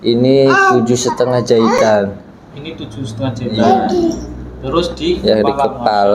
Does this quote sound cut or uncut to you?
uncut